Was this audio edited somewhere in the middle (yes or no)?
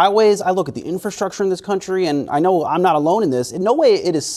no